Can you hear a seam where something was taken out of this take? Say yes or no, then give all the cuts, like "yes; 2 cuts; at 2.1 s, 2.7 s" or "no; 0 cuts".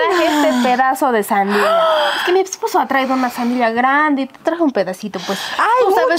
no; 0 cuts